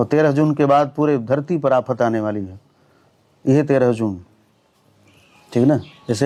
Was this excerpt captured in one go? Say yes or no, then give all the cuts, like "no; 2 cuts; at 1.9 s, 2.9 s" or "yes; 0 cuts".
yes; 0 cuts